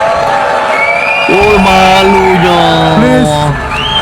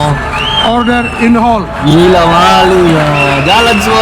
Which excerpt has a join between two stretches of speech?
first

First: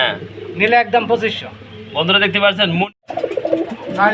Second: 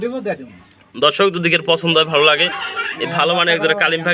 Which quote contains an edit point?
first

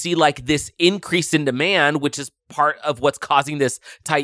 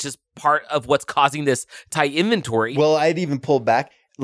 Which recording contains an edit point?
second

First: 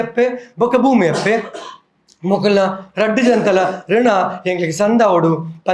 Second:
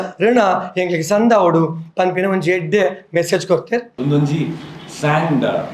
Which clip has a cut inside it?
second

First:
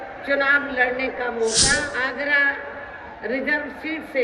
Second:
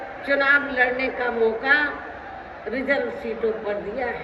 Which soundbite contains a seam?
first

